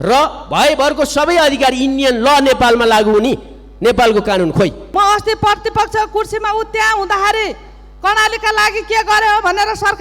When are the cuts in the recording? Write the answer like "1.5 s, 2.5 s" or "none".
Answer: 4.9 s

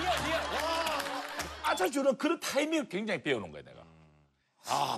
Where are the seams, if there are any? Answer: 1.4 s

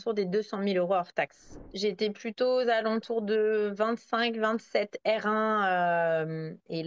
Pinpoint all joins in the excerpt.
1.6 s

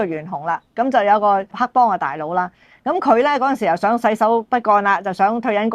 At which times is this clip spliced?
1.6 s

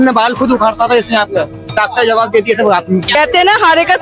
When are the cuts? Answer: 3.1 s

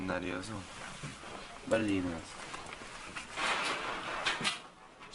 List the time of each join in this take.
none

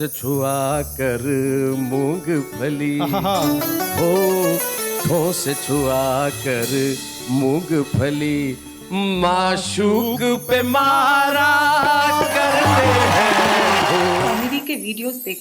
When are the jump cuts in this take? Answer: 14.3 s

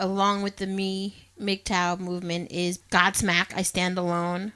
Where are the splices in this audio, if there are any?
2.8 s

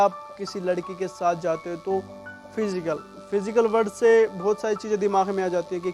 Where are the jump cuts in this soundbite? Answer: none

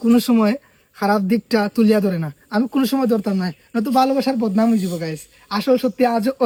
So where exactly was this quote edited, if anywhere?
none

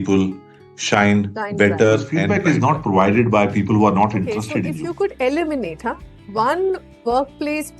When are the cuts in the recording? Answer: 2.3 s, 4.6 s

